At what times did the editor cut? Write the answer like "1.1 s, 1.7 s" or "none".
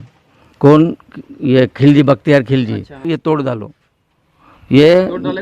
3.1 s